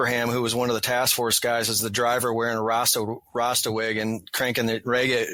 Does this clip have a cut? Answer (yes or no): no